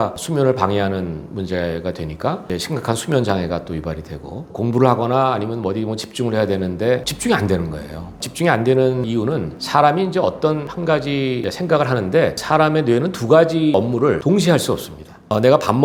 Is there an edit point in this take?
no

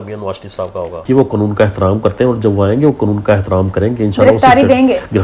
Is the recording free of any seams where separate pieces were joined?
no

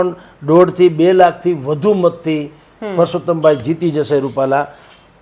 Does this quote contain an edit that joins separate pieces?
no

